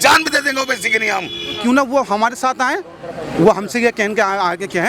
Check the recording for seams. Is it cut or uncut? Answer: cut